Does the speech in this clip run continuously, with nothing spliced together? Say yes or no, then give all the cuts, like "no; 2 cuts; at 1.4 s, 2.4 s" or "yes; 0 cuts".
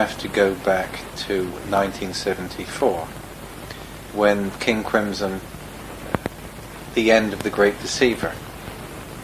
no; 1 cut; at 6.1 s